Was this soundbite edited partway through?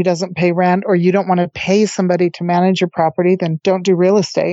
yes; 1 cut; at 3.6 s

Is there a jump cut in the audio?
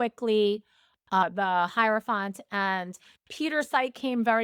yes; 1 cut; at 1.2 s

